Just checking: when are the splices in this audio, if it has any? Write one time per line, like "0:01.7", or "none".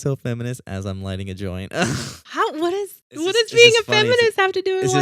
0:03.0

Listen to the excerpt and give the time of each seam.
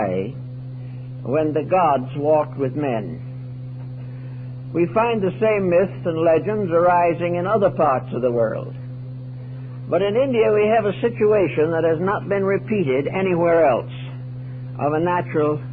0:01.0

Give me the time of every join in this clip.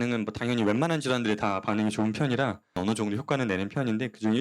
0:02.8

